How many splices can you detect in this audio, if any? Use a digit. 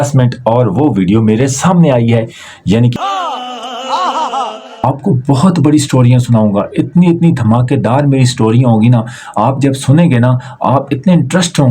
2